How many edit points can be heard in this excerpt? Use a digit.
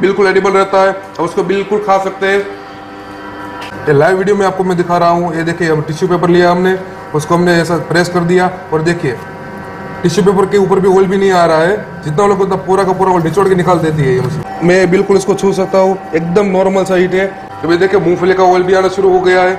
3